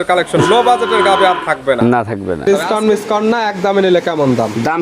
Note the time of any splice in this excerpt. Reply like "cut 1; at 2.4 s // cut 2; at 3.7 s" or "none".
cut 1; at 2.4 s